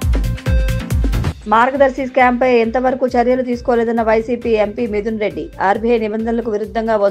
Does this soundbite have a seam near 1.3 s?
no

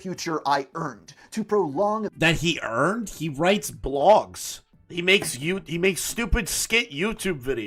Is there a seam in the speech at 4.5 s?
no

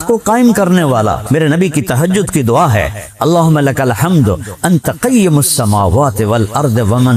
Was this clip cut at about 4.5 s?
no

